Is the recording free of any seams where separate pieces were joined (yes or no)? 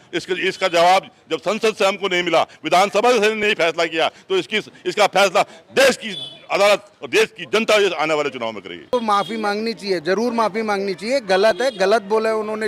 no